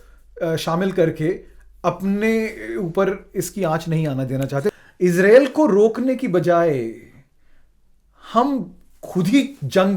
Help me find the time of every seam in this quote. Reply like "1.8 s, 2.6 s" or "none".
4.6 s